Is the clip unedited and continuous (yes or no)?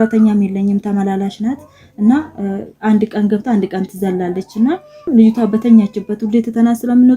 no